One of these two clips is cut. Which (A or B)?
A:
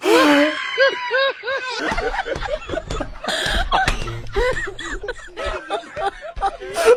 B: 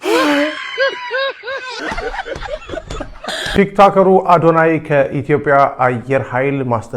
B